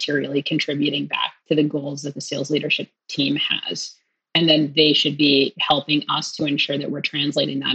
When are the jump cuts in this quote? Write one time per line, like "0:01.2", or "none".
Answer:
none